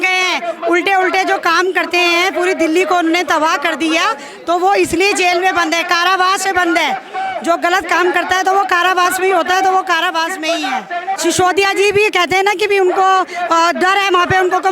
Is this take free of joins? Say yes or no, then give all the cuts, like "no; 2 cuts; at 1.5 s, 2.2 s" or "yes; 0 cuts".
no; 1 cut; at 11.1 s